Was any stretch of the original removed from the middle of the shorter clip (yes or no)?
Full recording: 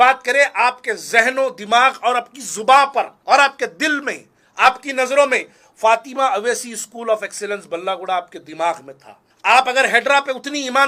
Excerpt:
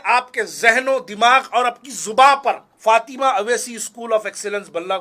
yes